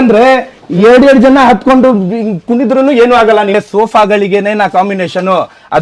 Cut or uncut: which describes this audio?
cut